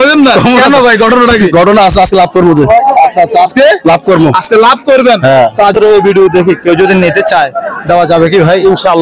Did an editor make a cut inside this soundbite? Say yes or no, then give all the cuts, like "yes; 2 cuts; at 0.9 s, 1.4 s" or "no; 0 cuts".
yes; 1 cut; at 5.8 s